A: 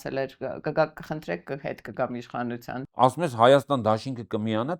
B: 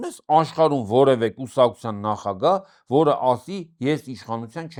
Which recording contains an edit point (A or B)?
A